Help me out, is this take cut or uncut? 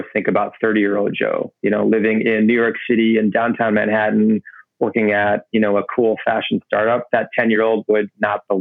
uncut